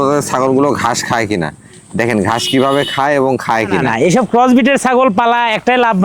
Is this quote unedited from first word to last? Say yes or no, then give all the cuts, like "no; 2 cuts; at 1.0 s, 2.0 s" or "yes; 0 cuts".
no; 1 cut; at 3.9 s